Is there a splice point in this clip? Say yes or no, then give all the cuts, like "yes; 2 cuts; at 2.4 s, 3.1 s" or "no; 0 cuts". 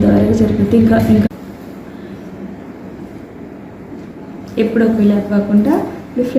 yes; 1 cut; at 1.2 s